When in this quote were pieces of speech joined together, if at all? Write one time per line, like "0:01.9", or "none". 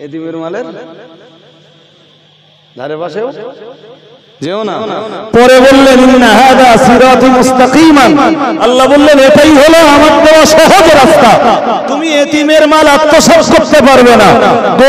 none